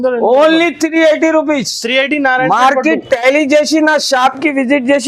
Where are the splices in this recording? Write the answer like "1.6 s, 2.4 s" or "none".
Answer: none